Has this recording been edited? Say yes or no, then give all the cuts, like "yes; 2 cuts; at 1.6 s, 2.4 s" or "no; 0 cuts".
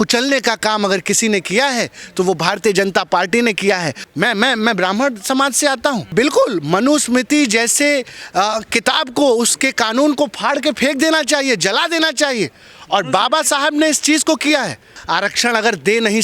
yes; 3 cuts; at 4.0 s, 6.1 s, 15.0 s